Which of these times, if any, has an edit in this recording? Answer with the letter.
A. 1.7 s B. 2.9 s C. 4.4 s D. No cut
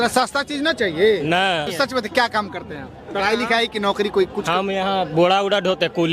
A